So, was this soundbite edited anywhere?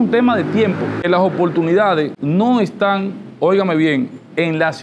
yes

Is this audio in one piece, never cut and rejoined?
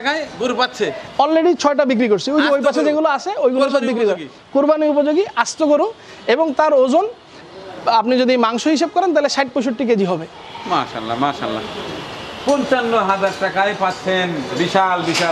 yes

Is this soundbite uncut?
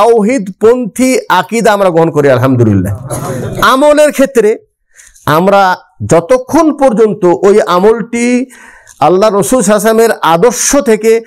yes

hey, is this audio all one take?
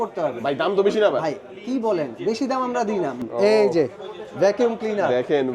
no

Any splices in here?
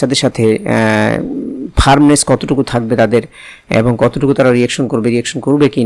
no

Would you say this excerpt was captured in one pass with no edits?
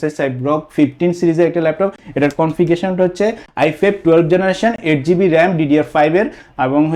yes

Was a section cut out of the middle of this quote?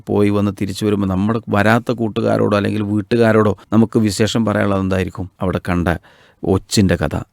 yes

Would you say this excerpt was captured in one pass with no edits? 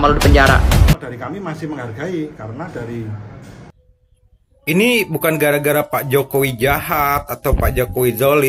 no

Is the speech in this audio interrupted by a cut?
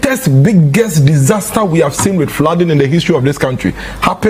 no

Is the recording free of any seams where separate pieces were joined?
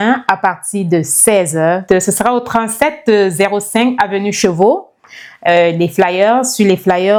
yes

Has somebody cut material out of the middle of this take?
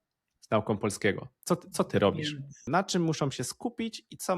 yes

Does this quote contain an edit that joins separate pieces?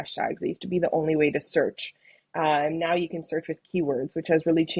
no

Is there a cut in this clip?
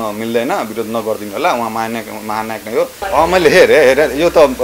yes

